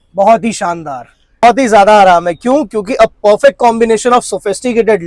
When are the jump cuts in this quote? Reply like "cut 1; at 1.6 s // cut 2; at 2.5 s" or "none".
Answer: cut 1; at 1.4 s